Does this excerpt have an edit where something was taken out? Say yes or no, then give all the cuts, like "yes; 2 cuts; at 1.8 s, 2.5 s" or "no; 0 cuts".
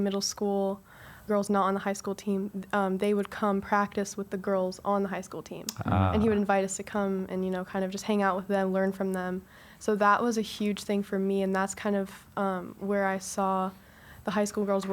yes; 1 cut; at 1.3 s